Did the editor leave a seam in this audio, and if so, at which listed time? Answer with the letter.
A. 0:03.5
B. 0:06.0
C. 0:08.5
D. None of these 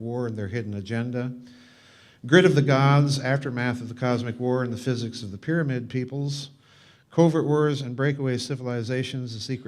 B